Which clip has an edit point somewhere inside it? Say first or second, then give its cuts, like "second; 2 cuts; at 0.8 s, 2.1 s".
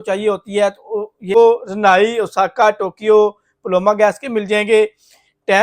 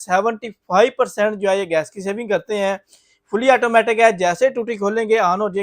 first; 1 cut; at 1.4 s